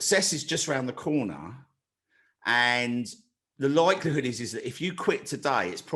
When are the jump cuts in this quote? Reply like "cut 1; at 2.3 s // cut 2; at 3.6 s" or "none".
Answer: none